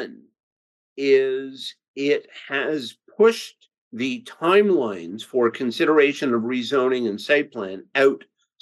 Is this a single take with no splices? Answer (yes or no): yes